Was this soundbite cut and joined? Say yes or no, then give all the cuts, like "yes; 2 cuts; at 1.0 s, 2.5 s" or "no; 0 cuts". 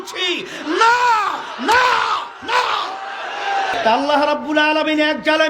yes; 1 cut; at 3.7 s